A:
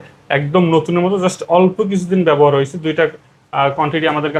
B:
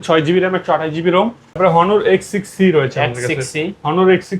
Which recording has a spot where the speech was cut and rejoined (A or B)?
B